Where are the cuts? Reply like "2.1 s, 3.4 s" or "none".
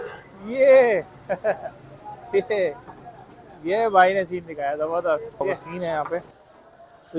5.4 s